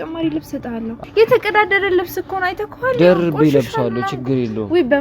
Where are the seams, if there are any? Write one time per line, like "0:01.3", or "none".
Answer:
0:00.9